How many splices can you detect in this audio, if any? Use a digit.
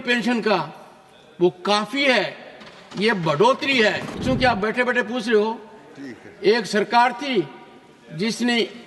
1